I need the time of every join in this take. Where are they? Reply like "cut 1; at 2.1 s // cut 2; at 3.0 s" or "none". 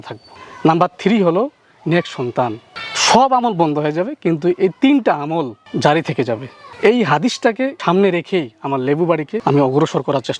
cut 1; at 9.3 s